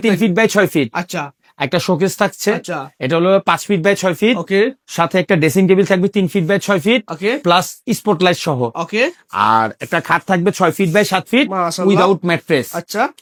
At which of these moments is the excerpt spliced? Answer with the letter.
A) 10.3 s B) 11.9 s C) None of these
C